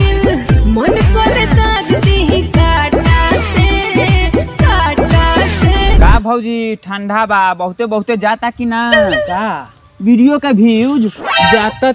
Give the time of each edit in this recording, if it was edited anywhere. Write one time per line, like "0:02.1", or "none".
0:05.9